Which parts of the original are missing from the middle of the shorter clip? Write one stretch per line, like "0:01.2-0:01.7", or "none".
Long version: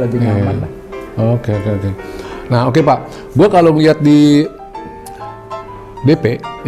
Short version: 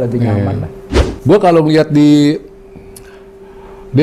0:01.0-0:03.1